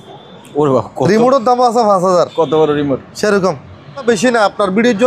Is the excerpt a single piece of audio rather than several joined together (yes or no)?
no